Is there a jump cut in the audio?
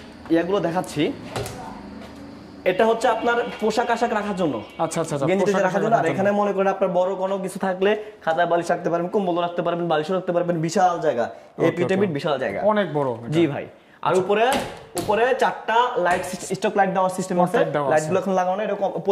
no; 0 cuts

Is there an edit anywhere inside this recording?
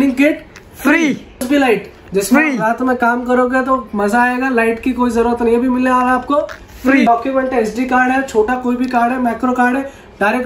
yes; 2 cuts; at 1.4 s, 7.1 s

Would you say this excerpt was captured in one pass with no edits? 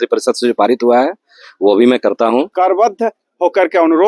no; 1 cut; at 2.5 s

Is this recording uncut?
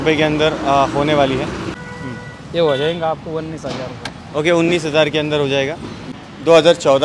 no; 2 cuts; at 1.8 s, 6.0 s

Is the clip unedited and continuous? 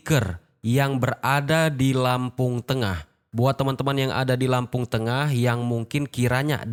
yes; 0 cuts

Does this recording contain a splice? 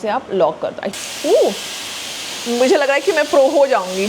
yes; 1 cut; at 1.0 s

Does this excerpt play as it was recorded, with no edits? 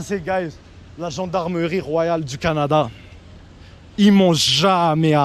yes; 0 cuts

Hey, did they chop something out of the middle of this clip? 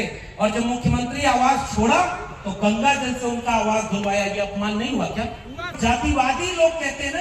yes; 1 cut; at 5.7 s

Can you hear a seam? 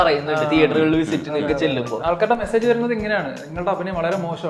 yes; 1 cut; at 1.9 s

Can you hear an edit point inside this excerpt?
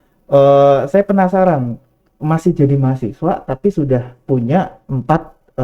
no; 0 cuts

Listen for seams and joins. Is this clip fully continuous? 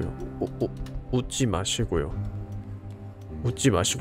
yes; 0 cuts

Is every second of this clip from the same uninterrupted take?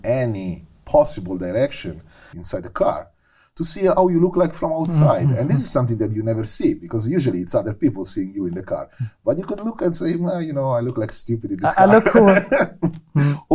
no; 1 cut; at 2.4 s

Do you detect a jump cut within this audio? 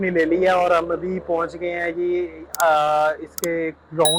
no; 0 cuts

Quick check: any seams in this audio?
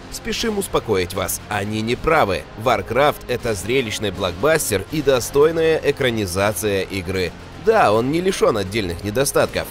no; 0 cuts

